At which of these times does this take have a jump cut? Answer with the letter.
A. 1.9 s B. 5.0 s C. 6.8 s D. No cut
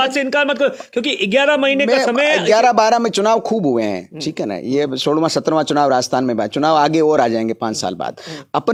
D